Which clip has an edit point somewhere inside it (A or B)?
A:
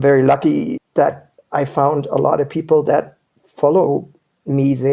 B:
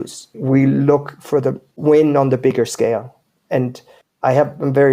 B